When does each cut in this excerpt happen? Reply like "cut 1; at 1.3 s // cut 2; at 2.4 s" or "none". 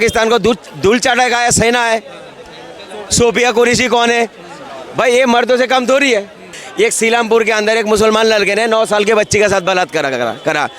cut 1; at 6.6 s

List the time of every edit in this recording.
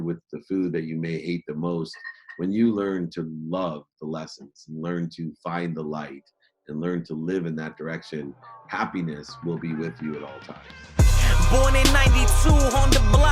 cut 1; at 10.8 s

